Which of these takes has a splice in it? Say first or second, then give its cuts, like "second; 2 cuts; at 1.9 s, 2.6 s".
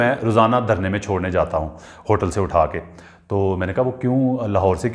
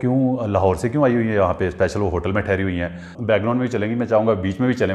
second; 1 cut; at 3.1 s